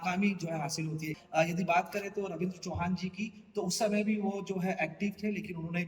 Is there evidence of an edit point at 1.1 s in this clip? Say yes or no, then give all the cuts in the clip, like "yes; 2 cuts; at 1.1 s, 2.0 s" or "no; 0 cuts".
yes; 1 cut; at 1.1 s